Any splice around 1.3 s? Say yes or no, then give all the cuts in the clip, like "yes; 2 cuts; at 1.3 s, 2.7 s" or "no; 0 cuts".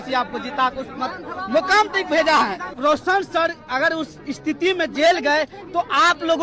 no; 1 cut; at 2.7 s